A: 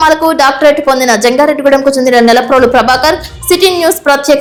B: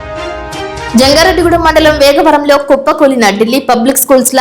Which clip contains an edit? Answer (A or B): B